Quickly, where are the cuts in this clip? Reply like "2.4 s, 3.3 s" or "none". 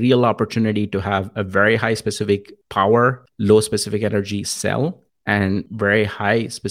2.6 s, 3.3 s, 5.5 s